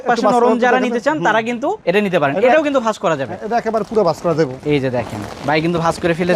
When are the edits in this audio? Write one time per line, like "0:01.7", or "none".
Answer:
none